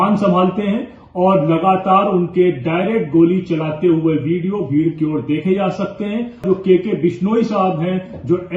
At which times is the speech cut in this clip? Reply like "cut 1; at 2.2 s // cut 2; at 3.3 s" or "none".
cut 1; at 6.4 s